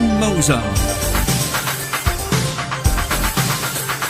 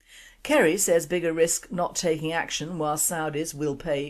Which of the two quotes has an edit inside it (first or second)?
second